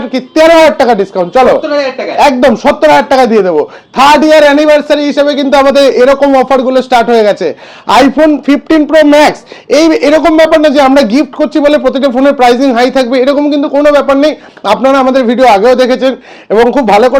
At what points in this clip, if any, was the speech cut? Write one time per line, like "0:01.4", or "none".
none